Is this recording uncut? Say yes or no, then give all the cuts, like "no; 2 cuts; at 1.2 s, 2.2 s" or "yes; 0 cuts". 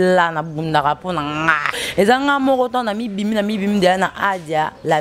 no; 1 cut; at 1.8 s